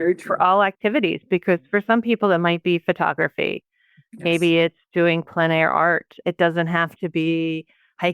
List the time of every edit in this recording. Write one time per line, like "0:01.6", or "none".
0:06.1